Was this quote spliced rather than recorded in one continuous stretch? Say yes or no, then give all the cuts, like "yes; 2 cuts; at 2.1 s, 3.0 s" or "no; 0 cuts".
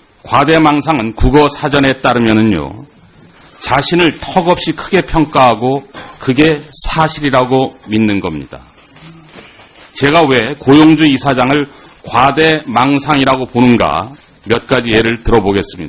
yes; 1 cut; at 6.4 s